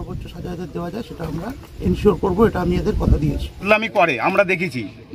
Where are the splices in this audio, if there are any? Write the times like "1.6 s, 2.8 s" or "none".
3.5 s